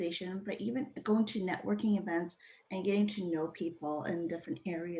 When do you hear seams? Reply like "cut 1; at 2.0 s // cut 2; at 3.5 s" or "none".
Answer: none